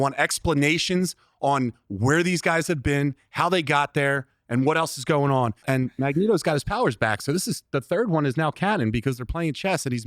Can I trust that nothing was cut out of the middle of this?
no; 1 cut; at 5.6 s

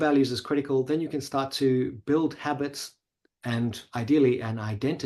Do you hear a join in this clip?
no; 0 cuts

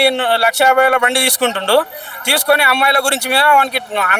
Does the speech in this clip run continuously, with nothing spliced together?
yes; 0 cuts

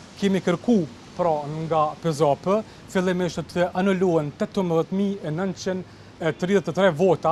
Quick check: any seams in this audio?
no; 0 cuts

